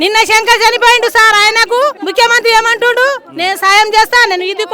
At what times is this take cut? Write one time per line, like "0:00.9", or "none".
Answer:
0:02.0